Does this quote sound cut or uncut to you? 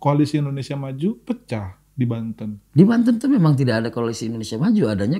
uncut